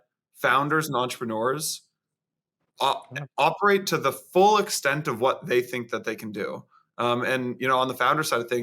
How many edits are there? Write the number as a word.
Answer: zero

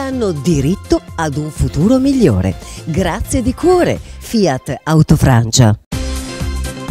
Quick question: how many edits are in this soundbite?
one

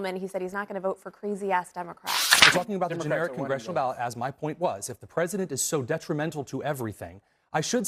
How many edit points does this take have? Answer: one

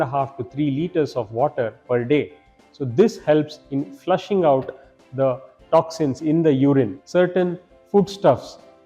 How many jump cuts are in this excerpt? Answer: one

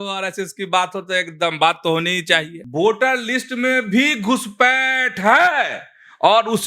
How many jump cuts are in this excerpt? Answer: one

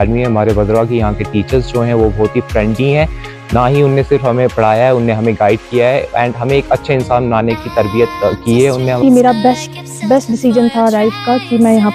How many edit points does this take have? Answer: one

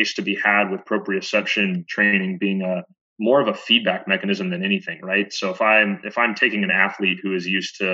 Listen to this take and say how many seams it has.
two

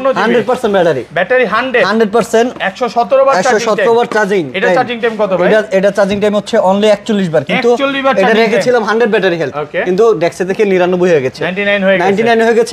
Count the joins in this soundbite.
zero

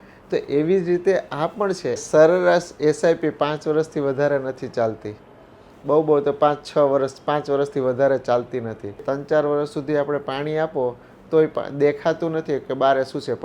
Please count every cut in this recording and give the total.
two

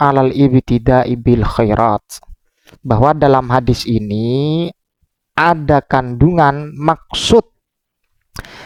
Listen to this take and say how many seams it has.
zero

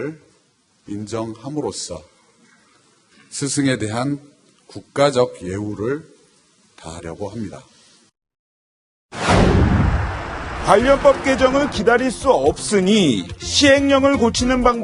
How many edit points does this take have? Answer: zero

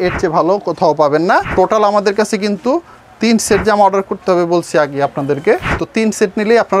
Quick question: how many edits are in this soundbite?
two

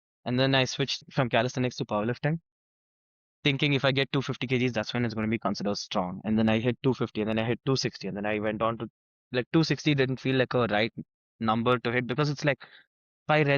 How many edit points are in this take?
one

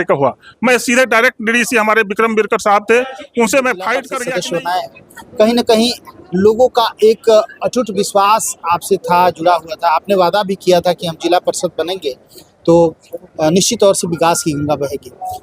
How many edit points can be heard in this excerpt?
one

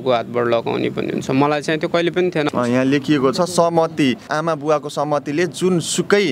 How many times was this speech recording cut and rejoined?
one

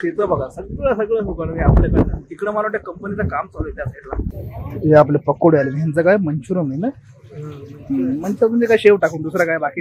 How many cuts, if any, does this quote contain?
one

